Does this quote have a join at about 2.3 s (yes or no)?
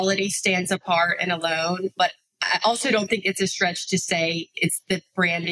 no